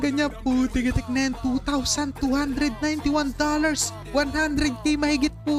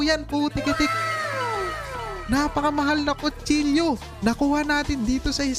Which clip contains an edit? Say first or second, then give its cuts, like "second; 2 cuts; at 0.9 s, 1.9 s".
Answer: second; 3 cuts; at 0.9 s, 2.2 s, 4.1 s